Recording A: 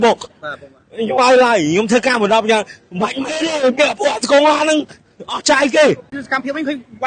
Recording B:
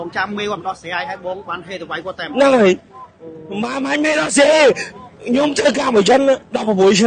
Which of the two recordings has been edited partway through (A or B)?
A